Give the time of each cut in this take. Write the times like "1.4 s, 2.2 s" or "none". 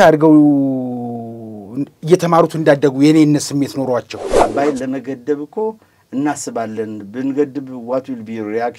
4.3 s